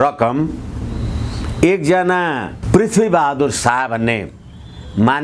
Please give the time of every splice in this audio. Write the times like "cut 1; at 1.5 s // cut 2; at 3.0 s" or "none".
none